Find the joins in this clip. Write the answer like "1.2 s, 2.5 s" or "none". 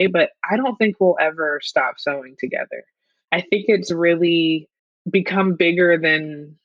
3.2 s